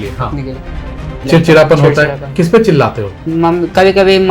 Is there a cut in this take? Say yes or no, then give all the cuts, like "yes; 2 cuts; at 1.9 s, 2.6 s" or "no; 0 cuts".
yes; 1 cut; at 1.0 s